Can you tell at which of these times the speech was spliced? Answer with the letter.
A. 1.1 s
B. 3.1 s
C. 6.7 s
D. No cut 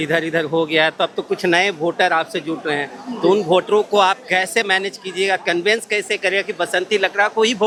D